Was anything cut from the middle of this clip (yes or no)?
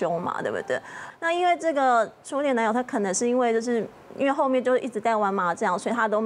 yes